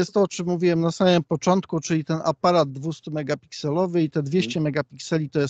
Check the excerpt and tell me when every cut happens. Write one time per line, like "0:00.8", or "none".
none